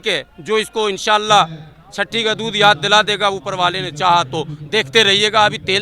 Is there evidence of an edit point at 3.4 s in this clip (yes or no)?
no